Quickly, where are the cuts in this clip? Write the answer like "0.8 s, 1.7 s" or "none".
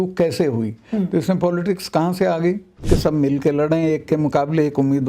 2.8 s